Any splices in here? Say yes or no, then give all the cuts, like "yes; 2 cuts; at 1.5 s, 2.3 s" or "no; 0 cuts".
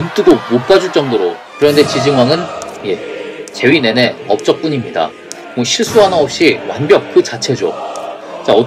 yes; 1 cut; at 1.4 s